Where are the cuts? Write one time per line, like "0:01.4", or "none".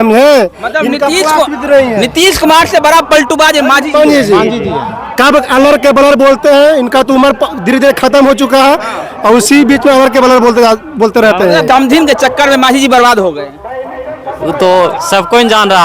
0:11.6